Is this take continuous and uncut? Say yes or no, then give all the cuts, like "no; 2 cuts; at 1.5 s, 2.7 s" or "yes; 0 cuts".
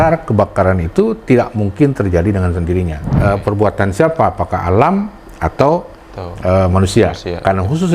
no; 1 cut; at 3.0 s